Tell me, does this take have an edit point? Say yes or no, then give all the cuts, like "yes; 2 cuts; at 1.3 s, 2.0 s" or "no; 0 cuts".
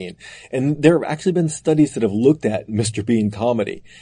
no; 0 cuts